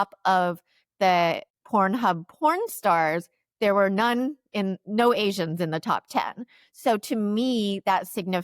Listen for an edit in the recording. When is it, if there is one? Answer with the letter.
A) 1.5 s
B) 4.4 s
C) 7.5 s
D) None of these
A